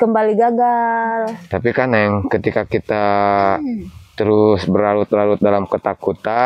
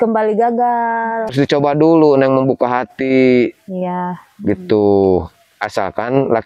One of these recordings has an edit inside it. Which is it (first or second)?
second